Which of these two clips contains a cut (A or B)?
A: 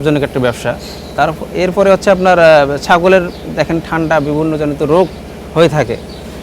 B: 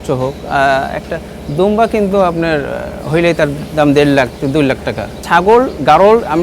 B